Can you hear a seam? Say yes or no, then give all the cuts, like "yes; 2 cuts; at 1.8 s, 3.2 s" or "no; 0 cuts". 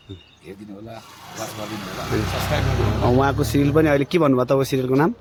no; 0 cuts